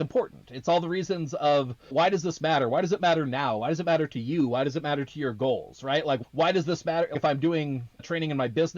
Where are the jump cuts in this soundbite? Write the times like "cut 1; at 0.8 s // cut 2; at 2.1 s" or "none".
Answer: cut 1; at 1.8 s